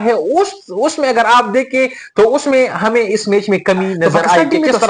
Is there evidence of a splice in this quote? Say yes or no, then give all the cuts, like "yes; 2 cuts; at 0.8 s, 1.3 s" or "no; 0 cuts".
no; 0 cuts